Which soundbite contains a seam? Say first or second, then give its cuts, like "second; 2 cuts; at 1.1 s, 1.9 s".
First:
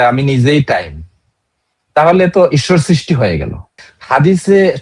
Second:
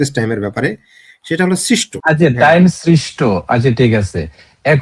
second; 1 cut; at 2.0 s